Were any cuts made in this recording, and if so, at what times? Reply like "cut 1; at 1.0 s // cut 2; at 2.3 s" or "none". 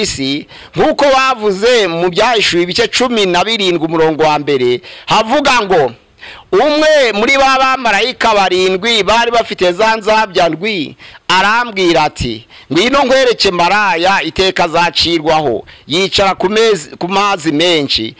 none